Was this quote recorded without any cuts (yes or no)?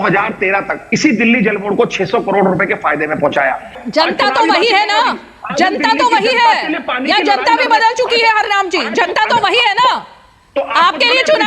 no